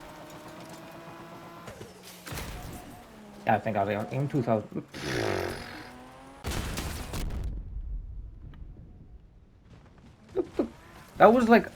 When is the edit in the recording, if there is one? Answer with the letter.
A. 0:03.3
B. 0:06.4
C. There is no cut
B